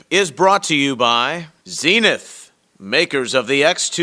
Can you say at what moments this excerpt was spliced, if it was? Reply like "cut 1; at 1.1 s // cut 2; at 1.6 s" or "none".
cut 1; at 1.4 s

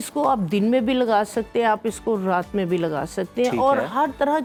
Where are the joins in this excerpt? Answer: none

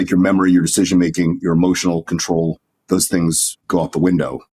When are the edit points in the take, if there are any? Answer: cut 1; at 3.5 s

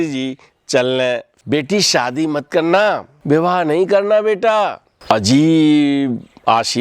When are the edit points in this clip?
cut 1; at 1.3 s // cut 2; at 3.1 s // cut 3; at 4.9 s

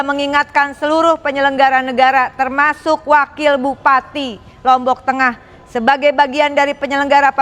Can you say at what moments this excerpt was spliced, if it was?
none

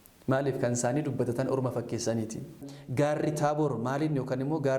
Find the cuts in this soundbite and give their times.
cut 1; at 2.6 s

